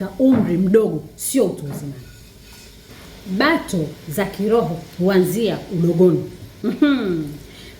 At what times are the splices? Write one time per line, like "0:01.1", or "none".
none

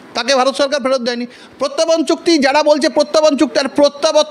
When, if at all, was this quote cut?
0:01.3

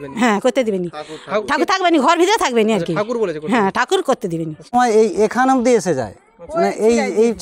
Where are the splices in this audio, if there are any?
0:04.7

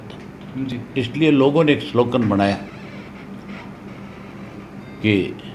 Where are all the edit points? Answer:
none

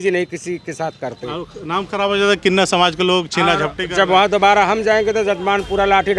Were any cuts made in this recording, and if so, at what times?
none

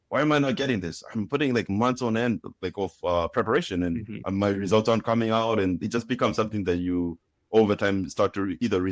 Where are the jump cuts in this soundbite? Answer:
none

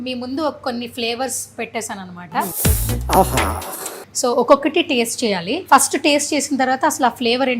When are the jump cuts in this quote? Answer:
0:02.5
0:04.0
0:05.5

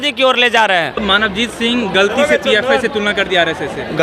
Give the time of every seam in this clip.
0:01.0

